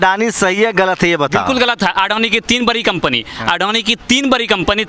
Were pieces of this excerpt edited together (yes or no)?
no